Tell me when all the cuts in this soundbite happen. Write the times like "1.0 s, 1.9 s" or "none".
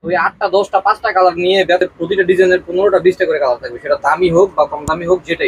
1.8 s